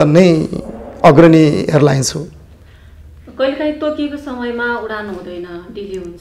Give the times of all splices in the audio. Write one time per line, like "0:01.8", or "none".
none

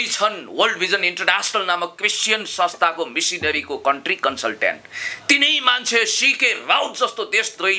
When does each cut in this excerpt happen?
none

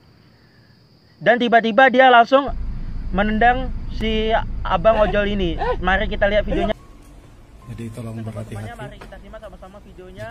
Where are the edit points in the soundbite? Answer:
0:06.7

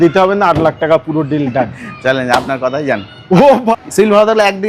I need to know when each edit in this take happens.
0:03.7

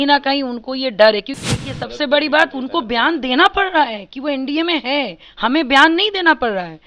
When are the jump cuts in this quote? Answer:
0:01.4

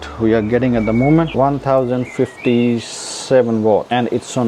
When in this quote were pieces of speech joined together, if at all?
none

